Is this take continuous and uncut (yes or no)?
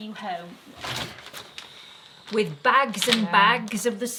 yes